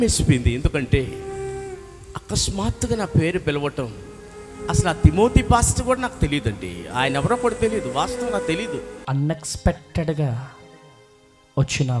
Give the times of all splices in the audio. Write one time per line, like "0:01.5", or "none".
none